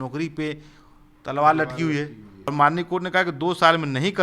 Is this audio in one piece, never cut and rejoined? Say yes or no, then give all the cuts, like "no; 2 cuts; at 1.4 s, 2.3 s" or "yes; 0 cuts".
no; 1 cut; at 2.5 s